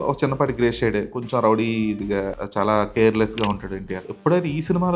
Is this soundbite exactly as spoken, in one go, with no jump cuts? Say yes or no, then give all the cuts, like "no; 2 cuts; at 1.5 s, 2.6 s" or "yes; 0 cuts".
no; 2 cuts; at 2.4 s, 4.0 s